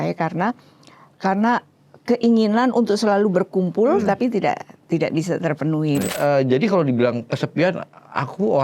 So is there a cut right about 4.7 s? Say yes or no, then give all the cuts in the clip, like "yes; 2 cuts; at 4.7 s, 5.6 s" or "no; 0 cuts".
no; 1 cut; at 6.2 s